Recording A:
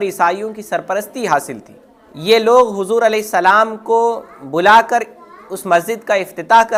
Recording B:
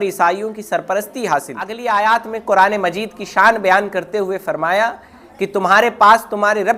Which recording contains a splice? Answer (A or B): B